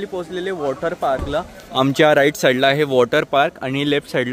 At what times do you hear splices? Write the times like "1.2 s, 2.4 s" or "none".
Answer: none